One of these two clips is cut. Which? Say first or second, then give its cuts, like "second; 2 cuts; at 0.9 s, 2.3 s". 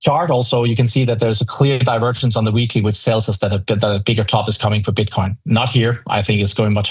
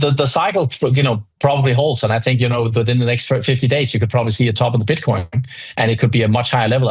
second; 1 cut; at 1.3 s